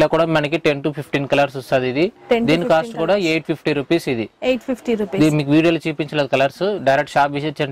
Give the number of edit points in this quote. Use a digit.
0